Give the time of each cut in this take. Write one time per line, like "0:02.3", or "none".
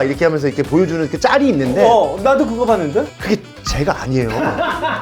0:03.2